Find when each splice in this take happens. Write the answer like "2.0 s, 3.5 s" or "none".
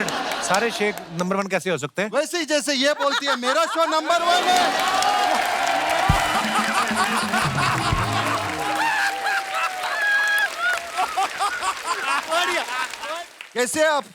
13.0 s